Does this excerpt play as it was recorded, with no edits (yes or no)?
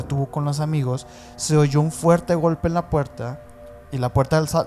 yes